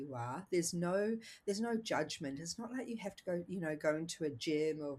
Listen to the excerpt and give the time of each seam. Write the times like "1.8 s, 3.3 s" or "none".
none